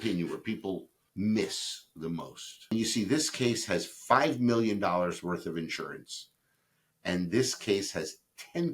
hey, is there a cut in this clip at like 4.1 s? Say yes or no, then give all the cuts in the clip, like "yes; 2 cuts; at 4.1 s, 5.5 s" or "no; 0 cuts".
no; 2 cuts; at 1.0 s, 2.7 s